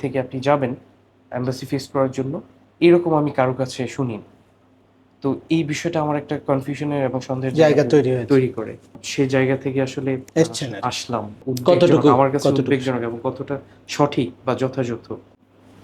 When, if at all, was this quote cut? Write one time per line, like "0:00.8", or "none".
0:09.0
0:10.2
0:11.3